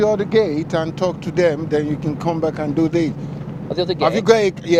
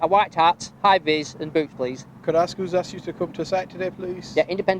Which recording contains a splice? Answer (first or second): second